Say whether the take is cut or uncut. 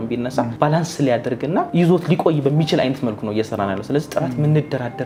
uncut